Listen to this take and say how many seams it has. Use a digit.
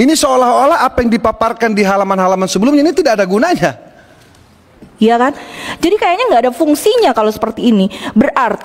1